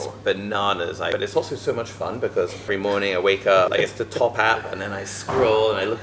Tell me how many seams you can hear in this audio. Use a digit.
3